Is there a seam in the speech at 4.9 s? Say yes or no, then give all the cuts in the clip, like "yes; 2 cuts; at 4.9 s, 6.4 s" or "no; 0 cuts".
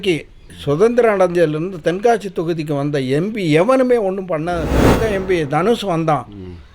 yes; 1 cut; at 4.9 s